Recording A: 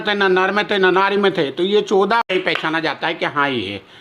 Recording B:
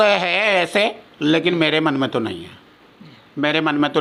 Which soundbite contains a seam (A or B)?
A